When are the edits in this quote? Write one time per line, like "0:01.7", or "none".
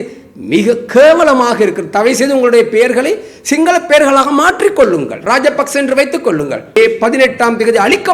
0:06.8